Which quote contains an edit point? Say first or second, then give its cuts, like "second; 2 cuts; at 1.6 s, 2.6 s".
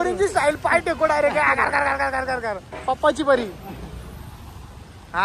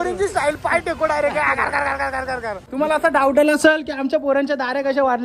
second; 1 cut; at 2.6 s